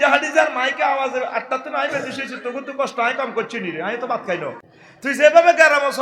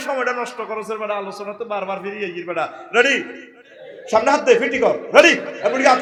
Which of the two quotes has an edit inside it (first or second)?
first